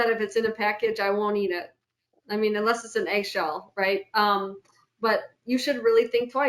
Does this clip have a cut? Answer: no; 0 cuts

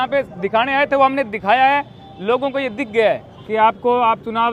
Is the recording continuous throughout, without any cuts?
no; 1 cut; at 3.3 s

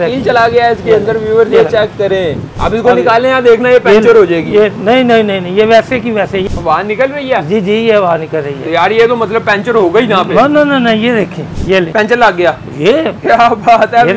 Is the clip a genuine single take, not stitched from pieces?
yes; 0 cuts

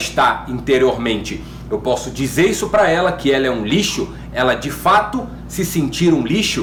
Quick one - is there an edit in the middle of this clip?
no; 0 cuts

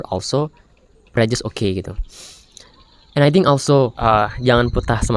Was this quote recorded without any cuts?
no; 1 cut; at 4.0 s

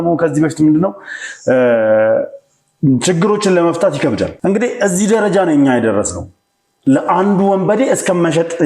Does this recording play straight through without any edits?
no; 1 cut; at 4.3 s

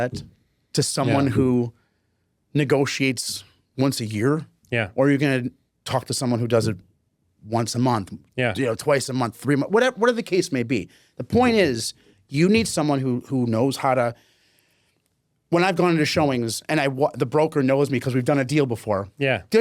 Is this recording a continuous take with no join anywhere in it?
yes; 0 cuts

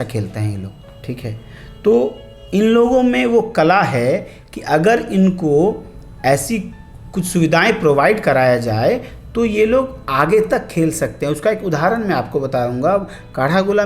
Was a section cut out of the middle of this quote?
no; 0 cuts

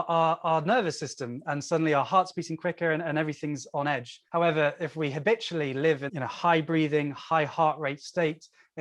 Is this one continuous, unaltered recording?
no; 2 cuts; at 4.1 s, 6.1 s

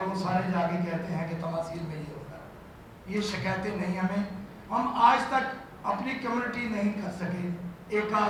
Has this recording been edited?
no; 0 cuts

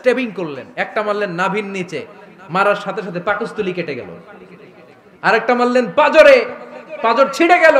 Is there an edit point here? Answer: no; 0 cuts

